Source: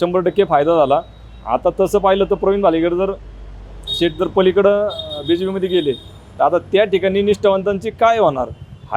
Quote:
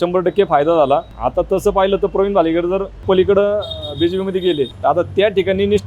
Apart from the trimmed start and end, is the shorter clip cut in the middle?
yes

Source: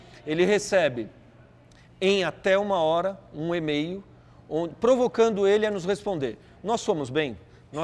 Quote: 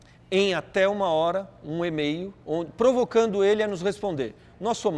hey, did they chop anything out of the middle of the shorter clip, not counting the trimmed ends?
yes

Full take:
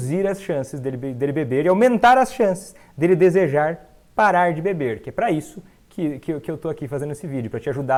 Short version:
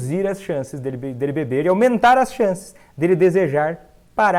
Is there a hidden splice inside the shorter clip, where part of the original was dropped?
no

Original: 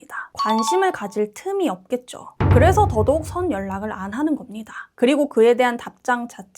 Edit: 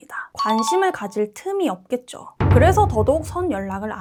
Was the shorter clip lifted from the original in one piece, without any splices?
yes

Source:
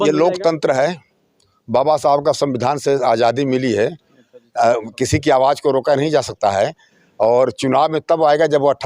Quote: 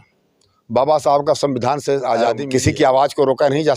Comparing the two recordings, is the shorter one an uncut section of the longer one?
no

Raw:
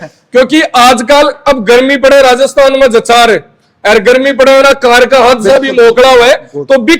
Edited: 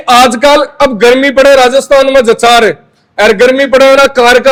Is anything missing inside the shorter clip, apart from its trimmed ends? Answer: no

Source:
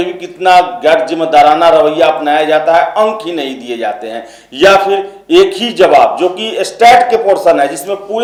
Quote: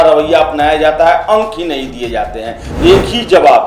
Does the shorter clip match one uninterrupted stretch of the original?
no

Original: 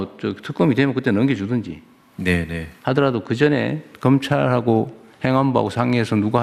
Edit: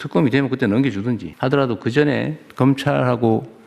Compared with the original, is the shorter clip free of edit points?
no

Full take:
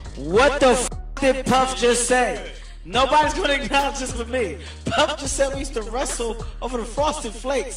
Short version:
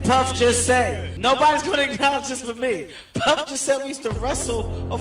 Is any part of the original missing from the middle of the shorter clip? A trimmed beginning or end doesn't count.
yes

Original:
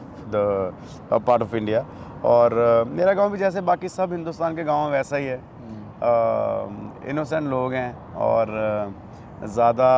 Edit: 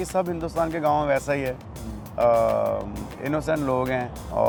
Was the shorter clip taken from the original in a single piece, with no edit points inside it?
yes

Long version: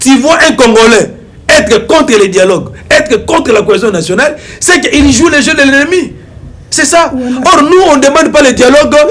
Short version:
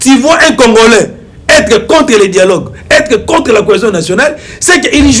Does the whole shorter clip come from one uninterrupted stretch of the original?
yes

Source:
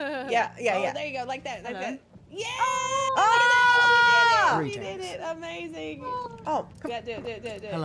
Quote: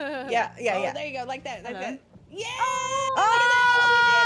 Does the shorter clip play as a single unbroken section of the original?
yes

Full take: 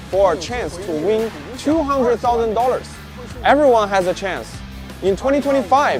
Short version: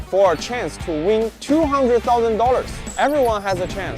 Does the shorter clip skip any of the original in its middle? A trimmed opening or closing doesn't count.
yes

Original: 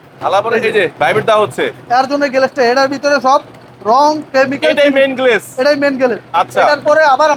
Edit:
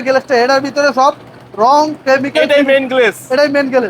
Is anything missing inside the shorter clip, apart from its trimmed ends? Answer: no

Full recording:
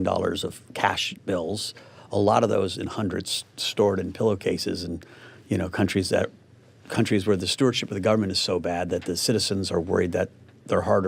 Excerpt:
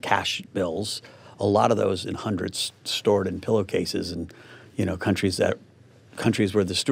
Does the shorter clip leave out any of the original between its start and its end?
no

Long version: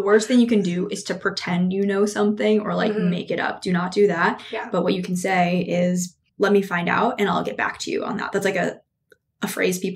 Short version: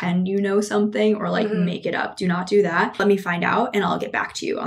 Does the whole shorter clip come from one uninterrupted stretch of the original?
no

